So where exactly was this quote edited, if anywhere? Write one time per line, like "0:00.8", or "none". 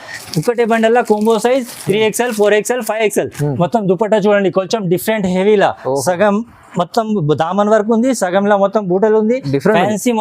0:03.5